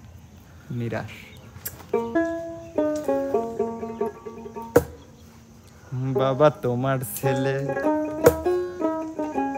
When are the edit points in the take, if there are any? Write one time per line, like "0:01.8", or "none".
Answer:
0:02.2